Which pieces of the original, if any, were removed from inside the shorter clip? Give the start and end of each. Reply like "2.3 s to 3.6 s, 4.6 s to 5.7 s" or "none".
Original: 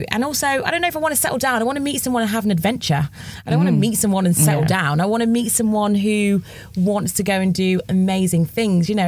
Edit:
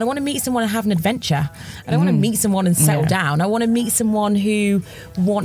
none